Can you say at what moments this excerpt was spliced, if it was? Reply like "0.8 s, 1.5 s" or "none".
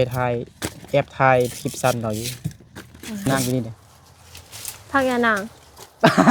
3.3 s